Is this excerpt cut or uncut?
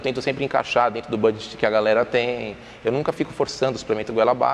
uncut